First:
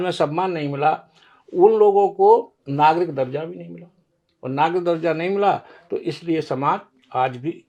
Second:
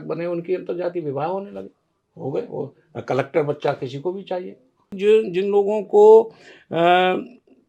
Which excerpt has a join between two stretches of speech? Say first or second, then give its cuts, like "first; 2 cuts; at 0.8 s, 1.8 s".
second; 1 cut; at 4.9 s